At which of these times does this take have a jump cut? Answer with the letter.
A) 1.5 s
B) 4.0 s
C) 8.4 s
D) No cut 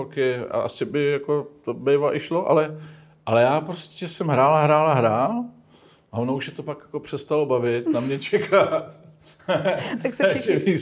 D